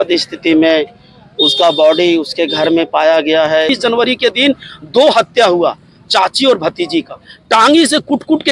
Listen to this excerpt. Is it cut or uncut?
cut